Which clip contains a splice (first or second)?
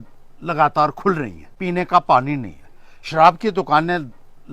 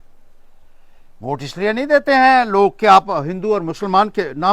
first